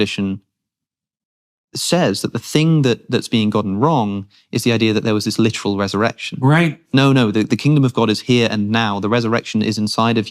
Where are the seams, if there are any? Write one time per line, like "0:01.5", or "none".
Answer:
none